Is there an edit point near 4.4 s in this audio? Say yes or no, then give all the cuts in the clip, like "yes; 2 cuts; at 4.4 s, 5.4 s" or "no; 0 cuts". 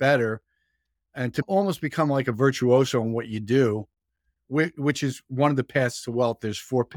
yes; 2 cuts; at 1.4 s, 4.4 s